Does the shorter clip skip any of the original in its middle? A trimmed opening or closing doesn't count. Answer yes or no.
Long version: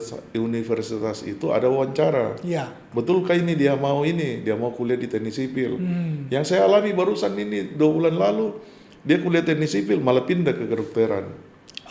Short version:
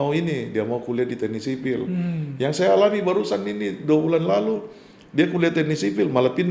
no